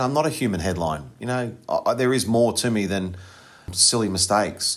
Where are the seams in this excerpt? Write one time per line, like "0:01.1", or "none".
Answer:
0:03.7